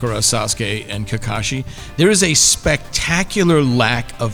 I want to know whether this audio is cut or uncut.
uncut